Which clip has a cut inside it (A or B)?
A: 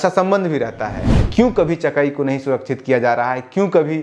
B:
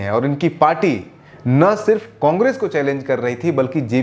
A